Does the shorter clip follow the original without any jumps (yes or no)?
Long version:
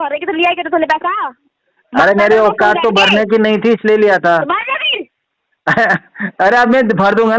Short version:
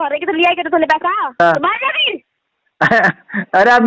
no